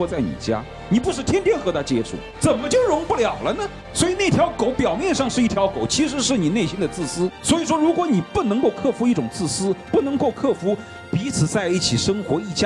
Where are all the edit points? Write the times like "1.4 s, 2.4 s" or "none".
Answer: none